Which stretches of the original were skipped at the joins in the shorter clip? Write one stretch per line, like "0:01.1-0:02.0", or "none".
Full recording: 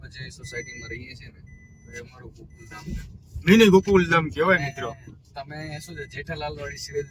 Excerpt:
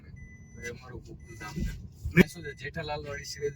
0:03.5-0:05.7